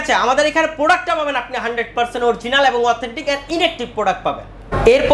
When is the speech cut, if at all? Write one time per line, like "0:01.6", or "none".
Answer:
none